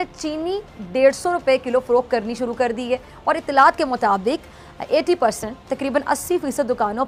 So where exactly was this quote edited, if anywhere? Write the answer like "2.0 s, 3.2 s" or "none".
none